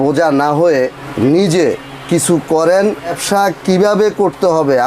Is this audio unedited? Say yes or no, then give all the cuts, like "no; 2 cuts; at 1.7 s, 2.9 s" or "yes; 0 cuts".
no; 2 cuts; at 1.0 s, 3.2 s